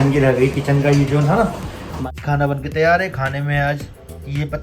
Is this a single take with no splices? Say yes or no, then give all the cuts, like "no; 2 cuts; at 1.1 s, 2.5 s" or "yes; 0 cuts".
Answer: no; 1 cut; at 2.0 s